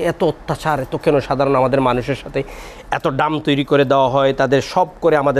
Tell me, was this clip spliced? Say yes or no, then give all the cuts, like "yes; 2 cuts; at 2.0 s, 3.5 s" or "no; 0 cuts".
no; 0 cuts